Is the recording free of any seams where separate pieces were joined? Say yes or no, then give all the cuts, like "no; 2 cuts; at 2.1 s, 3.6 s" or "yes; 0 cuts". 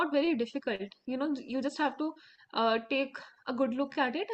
yes; 0 cuts